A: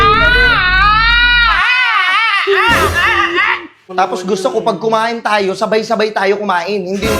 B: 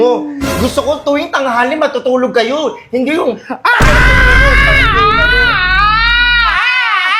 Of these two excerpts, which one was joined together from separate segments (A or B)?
A